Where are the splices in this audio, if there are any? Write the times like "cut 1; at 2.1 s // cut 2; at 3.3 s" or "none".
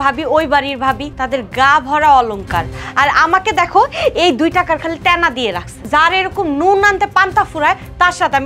cut 1; at 1.1 s // cut 2; at 5.7 s